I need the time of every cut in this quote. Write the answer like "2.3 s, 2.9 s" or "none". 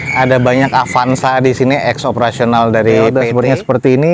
3.2 s